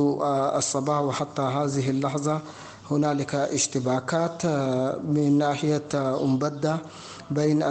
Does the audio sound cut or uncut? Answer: uncut